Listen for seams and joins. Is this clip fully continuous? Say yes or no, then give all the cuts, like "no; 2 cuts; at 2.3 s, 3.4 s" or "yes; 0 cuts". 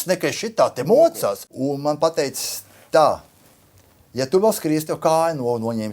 no; 1 cut; at 1.5 s